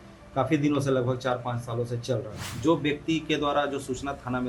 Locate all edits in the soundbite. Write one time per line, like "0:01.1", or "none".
0:02.5